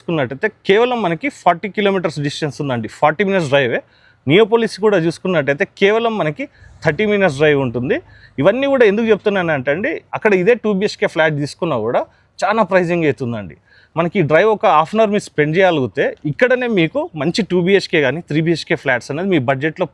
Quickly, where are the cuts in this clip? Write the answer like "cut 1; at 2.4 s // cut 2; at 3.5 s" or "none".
none